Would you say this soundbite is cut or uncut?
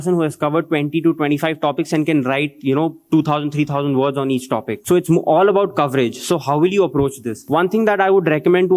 cut